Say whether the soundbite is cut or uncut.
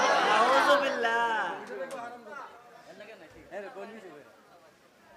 uncut